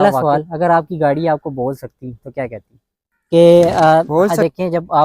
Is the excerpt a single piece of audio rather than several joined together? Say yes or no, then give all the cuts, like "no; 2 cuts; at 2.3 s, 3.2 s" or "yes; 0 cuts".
no; 1 cut; at 3.1 s